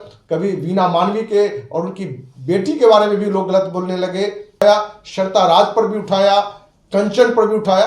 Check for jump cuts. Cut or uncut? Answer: cut